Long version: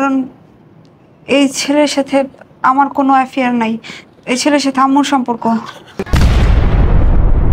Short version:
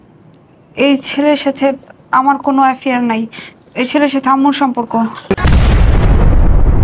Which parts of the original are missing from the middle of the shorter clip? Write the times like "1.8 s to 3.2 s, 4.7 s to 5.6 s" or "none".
5.7 s to 5.9 s